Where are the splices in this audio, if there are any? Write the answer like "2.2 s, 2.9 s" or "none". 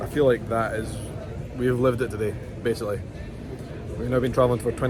none